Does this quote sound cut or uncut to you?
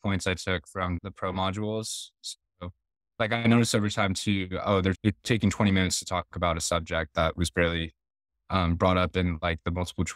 cut